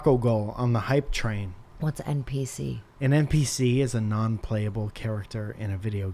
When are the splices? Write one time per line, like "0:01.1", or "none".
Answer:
0:01.6
0:02.9